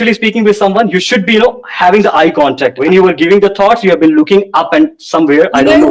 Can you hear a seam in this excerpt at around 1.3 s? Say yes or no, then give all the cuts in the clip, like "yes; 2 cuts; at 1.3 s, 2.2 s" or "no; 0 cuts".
no; 1 cut; at 2.8 s